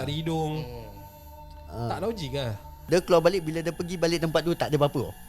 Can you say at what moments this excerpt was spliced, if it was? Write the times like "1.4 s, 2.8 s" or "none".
2.7 s